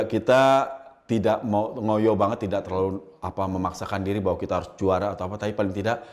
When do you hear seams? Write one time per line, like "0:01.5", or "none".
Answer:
none